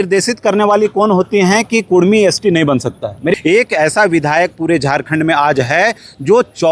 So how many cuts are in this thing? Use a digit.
1